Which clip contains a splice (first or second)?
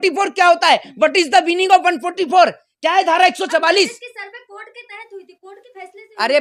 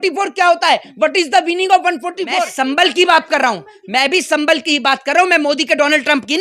second